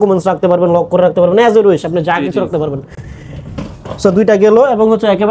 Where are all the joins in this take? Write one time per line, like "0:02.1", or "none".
none